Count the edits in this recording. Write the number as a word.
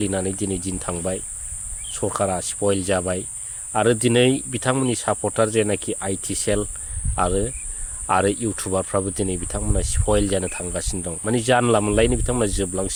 zero